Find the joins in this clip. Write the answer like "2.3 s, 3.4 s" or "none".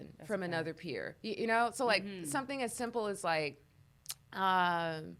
none